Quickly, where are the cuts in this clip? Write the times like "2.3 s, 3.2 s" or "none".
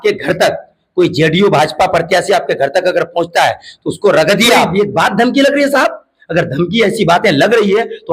4.7 s